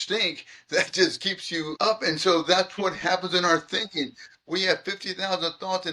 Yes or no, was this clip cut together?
yes